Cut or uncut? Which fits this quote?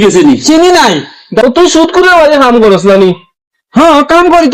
cut